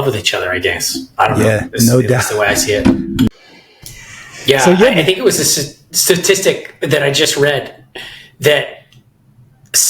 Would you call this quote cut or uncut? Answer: cut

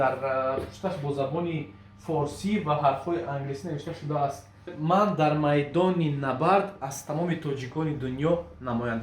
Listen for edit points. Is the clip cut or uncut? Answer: cut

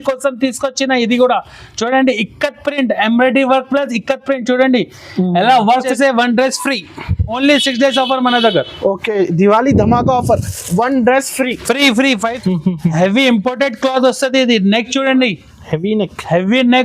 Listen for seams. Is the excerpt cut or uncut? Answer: cut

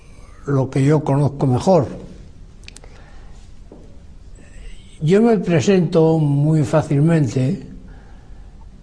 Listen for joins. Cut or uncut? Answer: cut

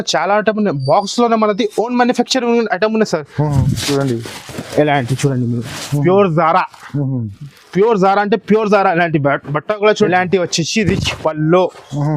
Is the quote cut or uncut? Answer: cut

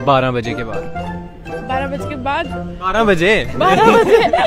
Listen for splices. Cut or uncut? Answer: cut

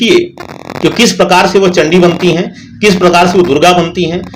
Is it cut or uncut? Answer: uncut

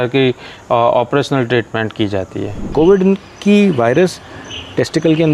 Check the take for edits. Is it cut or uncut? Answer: cut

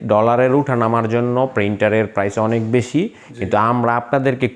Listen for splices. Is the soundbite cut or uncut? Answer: uncut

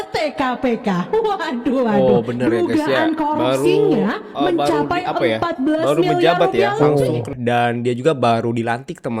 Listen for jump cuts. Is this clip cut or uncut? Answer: uncut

